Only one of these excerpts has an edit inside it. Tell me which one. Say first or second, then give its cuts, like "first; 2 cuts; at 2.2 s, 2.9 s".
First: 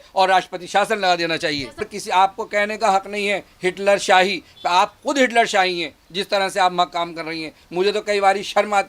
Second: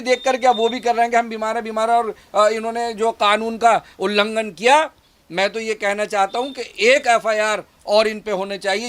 first; 1 cut; at 1.9 s